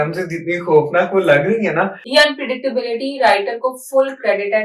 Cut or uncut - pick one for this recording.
cut